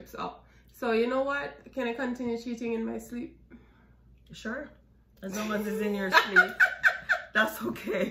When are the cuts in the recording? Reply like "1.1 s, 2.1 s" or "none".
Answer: none